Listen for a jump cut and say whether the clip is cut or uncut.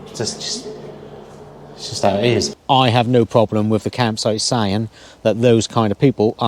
cut